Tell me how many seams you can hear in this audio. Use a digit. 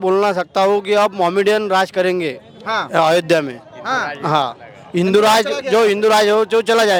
0